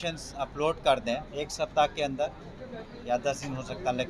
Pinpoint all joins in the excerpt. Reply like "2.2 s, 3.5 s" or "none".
1.3 s